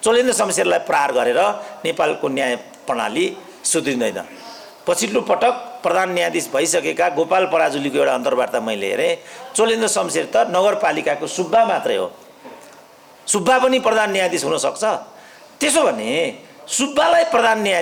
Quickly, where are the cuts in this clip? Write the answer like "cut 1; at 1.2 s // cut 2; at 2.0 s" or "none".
none